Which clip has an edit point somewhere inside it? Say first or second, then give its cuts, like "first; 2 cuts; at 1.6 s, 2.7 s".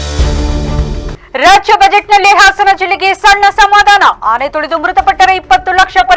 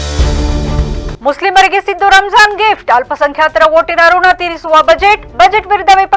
first; 1 cut; at 1.1 s